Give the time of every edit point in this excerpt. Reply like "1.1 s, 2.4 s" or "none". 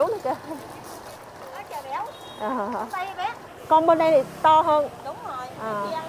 3.5 s

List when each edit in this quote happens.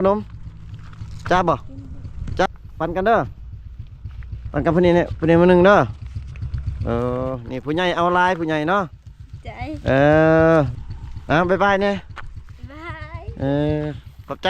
2.5 s, 10.8 s

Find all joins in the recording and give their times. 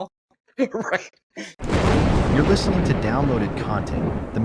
1.5 s

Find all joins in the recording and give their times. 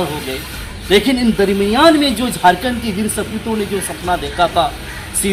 none

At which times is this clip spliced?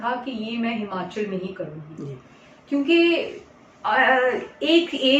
none

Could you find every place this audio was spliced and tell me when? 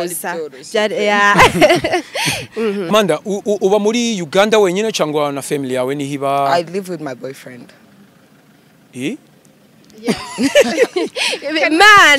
2.9 s

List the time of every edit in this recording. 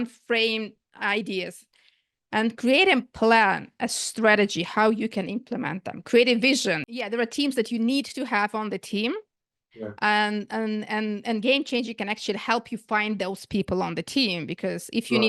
6.9 s

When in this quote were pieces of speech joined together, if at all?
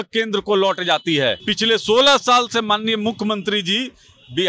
1.4 s

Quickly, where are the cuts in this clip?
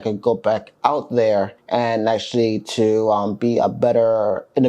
1.6 s

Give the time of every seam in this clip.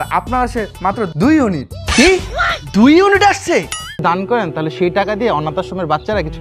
3.9 s

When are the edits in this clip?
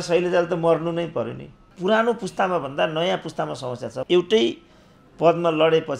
1.7 s, 4.0 s

